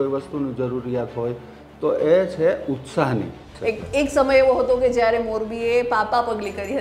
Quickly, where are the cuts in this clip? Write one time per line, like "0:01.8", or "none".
0:03.4